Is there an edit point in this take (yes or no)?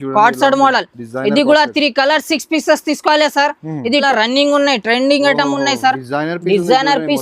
yes